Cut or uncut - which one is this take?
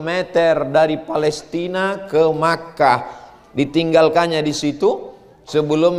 uncut